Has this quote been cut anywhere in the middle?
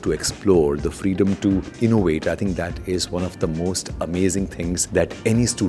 yes; 2 cuts; at 1.7 s, 4.8 s

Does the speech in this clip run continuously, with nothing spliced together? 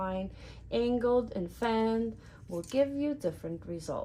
yes; 0 cuts

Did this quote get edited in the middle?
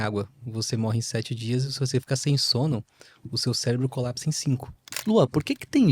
yes; 1 cut; at 4.9 s

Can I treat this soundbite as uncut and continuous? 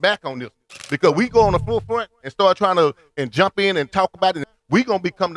no; 1 cut; at 4.5 s

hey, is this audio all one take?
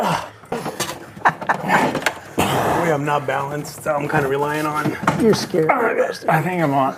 yes; 0 cuts

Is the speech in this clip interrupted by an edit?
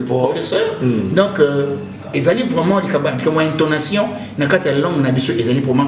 no; 0 cuts

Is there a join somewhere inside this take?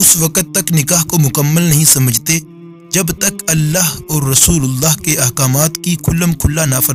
no; 0 cuts

